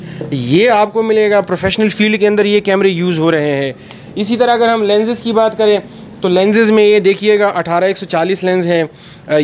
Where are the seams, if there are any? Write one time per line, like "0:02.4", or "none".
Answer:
none